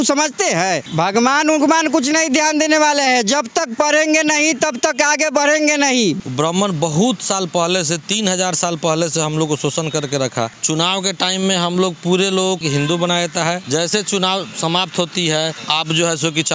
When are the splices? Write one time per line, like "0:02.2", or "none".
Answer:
0:00.9
0:06.2
0:10.6
0:12.6
0:13.6
0:15.6